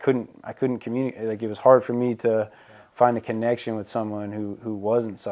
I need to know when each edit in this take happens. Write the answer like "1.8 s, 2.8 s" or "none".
none

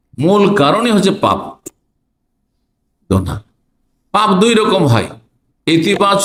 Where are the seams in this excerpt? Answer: none

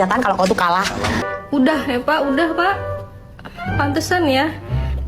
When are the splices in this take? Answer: 1.2 s

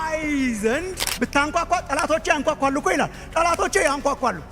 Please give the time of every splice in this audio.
1.1 s

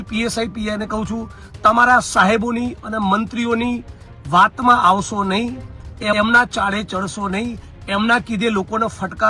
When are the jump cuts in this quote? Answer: none

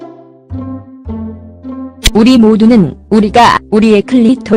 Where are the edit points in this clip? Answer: 2.0 s

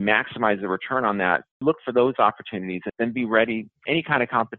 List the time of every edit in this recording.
1.5 s

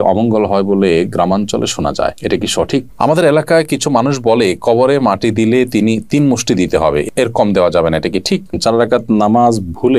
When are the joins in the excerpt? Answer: 2.9 s, 8.6 s

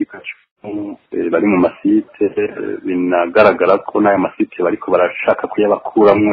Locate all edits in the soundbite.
1.0 s

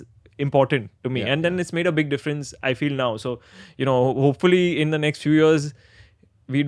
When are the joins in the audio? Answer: none

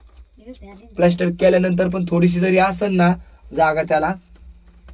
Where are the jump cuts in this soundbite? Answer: none

